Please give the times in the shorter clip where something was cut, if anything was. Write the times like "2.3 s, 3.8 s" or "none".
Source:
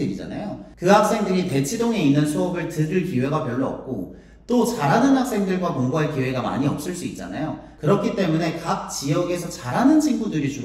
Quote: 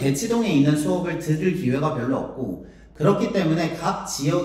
2.8 s